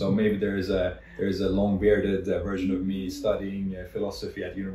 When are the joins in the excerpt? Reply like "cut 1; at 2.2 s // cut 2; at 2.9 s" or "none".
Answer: none